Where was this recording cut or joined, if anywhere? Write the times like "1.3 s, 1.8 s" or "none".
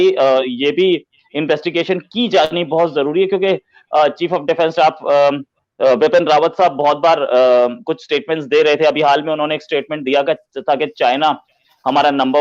none